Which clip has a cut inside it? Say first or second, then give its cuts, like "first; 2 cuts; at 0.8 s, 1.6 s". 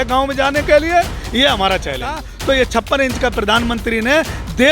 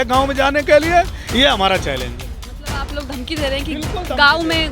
first; 1 cut; at 2.3 s